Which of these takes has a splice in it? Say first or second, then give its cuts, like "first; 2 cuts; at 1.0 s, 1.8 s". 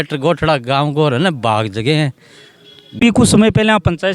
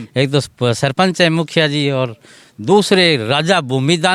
first; 1 cut; at 3.0 s